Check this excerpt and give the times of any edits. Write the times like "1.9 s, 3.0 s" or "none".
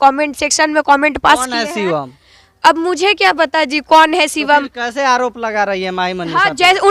none